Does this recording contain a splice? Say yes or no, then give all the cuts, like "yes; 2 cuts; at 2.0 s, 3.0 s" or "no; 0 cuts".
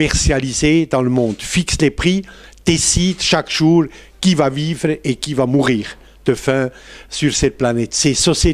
no; 0 cuts